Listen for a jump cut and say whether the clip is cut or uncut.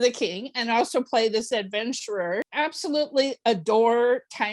cut